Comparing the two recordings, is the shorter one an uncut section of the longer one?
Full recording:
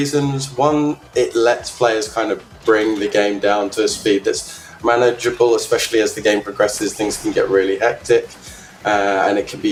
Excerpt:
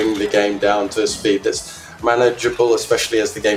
yes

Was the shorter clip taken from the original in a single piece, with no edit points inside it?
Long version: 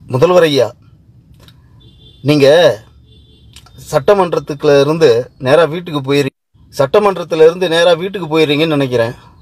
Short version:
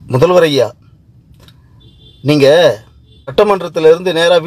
no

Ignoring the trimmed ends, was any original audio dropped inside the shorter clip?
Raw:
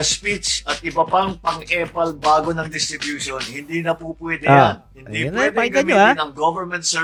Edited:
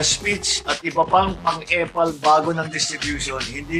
no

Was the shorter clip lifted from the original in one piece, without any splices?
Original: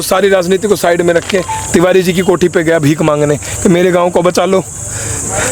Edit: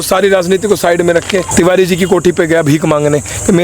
no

